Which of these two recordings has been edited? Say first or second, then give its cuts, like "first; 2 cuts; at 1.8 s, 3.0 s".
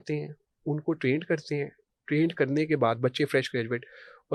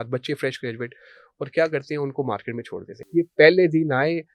second; 1 cut; at 3.0 s